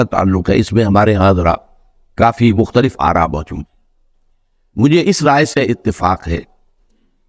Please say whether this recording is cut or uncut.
uncut